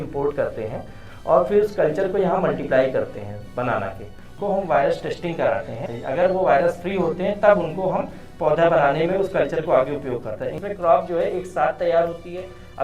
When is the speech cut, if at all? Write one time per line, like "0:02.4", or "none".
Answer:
0:04.3
0:05.9
0:10.6